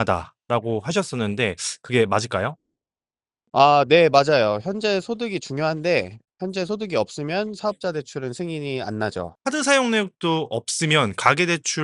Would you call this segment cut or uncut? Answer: cut